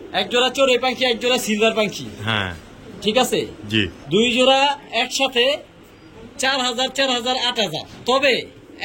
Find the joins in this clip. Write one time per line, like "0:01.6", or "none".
none